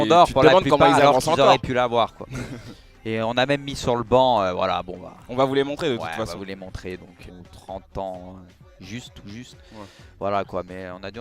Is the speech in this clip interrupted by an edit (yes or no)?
no